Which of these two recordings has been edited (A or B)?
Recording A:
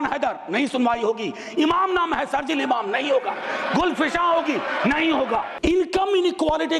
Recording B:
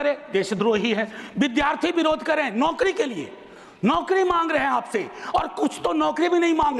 A